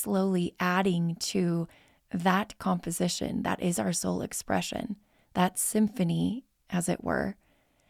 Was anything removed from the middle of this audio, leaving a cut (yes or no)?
no